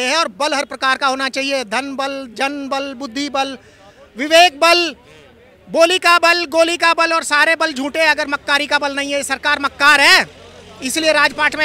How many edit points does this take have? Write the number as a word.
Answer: zero